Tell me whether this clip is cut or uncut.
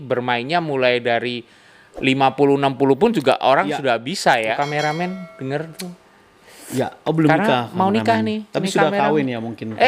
cut